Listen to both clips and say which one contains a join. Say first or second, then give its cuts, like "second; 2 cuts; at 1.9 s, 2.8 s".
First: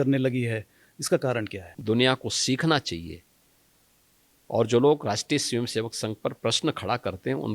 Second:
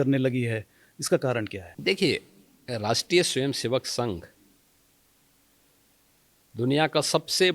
first; 1 cut; at 1.6 s